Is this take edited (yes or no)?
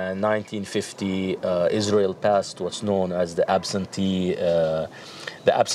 no